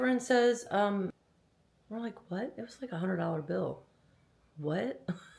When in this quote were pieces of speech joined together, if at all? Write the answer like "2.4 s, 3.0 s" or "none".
1.2 s

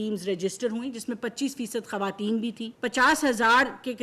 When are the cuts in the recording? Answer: 2.7 s

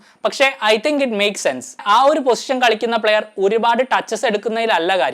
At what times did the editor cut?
1.8 s

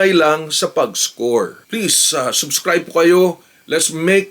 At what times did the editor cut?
1.6 s

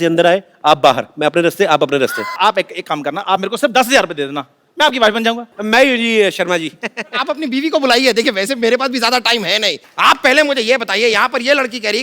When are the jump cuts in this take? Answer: 2.3 s, 5.5 s, 9.8 s

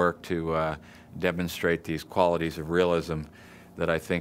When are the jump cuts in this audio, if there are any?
1.5 s

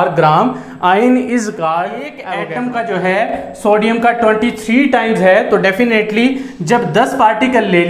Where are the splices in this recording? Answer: 2.2 s

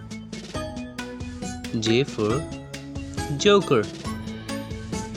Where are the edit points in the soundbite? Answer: 1.2 s, 3.8 s

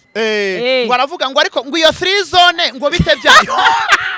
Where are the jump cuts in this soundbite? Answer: none

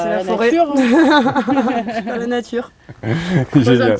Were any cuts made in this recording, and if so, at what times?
none

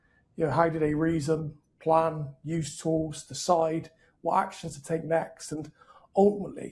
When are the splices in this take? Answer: none

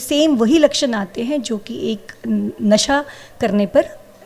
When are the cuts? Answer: none

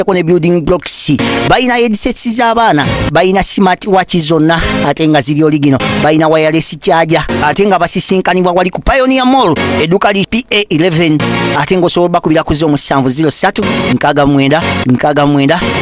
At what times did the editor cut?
none

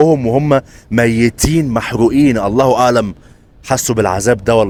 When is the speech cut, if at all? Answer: none

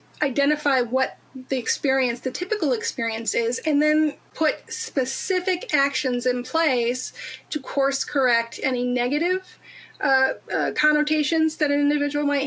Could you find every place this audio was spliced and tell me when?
4.2 s

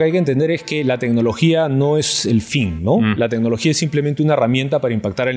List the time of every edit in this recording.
none

